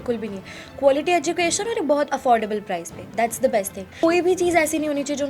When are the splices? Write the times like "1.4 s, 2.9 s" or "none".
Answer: 4.0 s

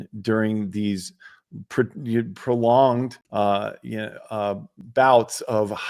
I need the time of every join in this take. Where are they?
3.2 s, 4.7 s

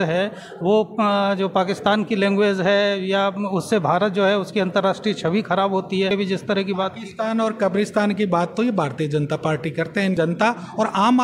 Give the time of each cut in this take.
6.1 s, 10.1 s

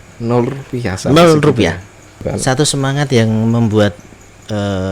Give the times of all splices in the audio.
2.2 s

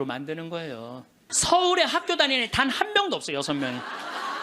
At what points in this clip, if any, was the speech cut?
1.2 s

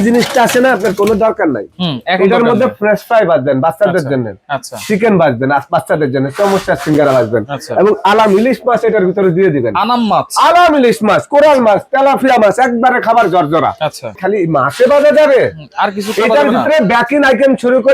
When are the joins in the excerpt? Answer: 14.1 s

